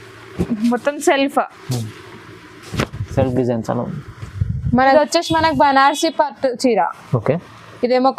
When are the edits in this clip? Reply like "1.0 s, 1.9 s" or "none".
5.0 s